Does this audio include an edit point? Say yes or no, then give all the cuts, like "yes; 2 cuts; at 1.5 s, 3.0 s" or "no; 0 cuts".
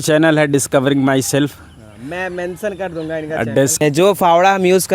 yes; 1 cut; at 3.8 s